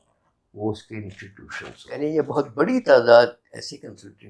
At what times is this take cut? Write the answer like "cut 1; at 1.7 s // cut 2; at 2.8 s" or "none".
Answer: cut 1; at 1.9 s